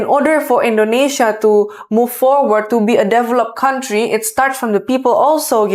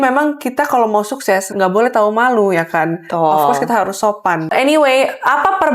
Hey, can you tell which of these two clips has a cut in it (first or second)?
second